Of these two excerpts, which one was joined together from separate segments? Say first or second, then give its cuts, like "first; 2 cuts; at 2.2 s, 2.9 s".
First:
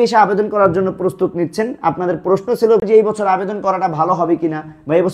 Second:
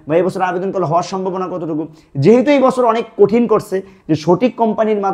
first; 1 cut; at 2.8 s